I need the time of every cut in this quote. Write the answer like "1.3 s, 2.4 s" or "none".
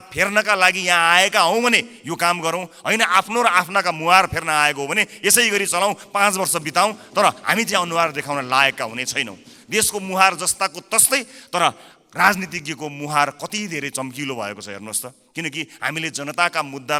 none